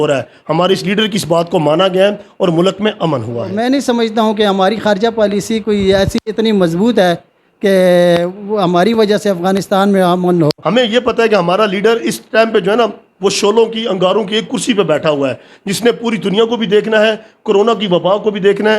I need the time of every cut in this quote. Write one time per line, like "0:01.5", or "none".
0:03.6
0:10.6